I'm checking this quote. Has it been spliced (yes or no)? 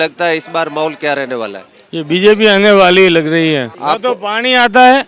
yes